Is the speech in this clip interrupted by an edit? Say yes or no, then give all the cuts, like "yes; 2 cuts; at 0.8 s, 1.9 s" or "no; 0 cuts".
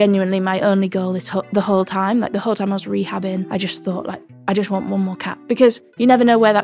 no; 0 cuts